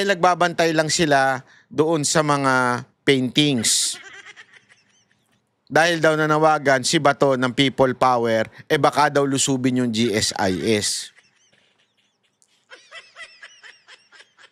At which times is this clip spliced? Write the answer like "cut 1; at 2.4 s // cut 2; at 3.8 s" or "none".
none

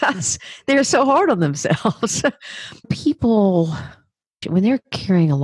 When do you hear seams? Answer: cut 1; at 2.9 s // cut 2; at 4.4 s

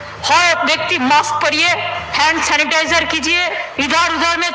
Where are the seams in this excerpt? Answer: cut 1; at 2.0 s // cut 2; at 3.7 s

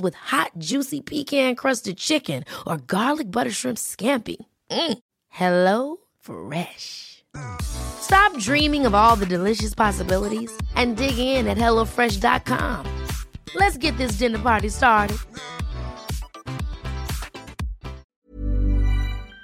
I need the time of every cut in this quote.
cut 1; at 18.1 s

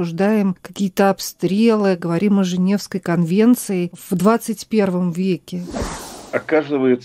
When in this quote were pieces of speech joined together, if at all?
cut 1; at 4.0 s // cut 2; at 5.8 s

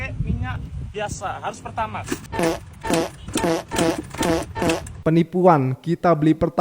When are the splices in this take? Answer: cut 1; at 2.3 s // cut 2; at 4.9 s

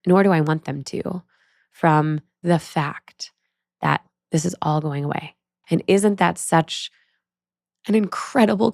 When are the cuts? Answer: cut 1; at 2.4 s // cut 2; at 4.0 s // cut 3; at 5.5 s

